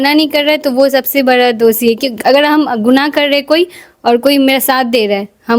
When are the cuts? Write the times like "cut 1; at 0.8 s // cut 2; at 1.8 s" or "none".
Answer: none